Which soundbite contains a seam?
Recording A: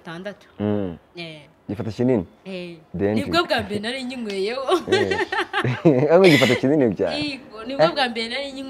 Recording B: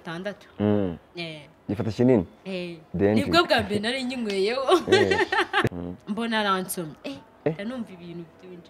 B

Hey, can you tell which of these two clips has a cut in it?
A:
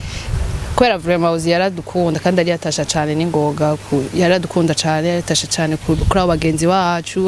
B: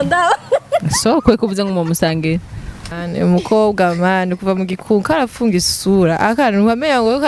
B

